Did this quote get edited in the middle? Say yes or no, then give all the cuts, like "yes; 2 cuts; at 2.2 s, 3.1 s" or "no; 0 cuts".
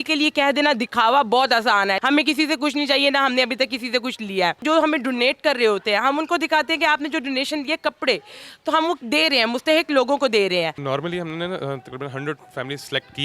yes; 3 cuts; at 2.0 s, 4.6 s, 10.8 s